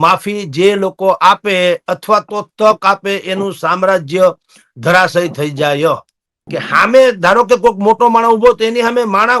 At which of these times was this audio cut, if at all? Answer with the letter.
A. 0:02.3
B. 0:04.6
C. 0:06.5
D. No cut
C